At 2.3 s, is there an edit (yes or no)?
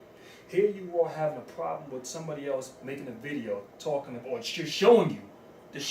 no